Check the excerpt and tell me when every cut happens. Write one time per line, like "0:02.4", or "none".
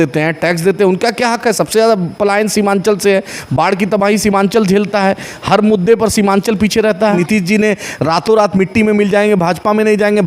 0:07.2